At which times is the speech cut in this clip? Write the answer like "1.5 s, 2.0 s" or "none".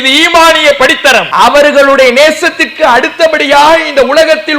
1.3 s